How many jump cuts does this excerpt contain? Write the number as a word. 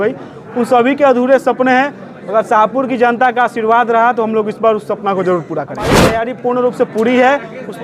one